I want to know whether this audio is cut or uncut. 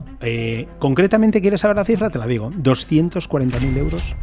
uncut